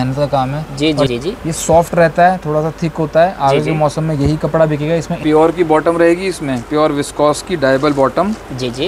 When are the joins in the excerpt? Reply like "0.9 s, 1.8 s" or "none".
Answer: 1.1 s, 5.1 s